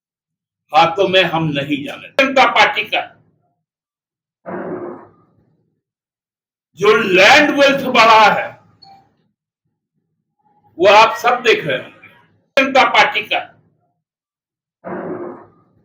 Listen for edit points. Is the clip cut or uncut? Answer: cut